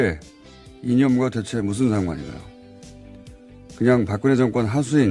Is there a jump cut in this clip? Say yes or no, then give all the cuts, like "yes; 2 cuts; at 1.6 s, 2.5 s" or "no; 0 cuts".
no; 0 cuts